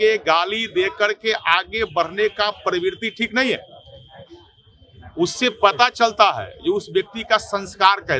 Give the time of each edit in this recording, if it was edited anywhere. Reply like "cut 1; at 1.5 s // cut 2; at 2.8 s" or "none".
none